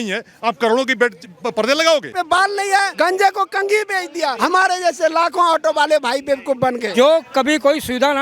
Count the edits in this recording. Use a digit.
2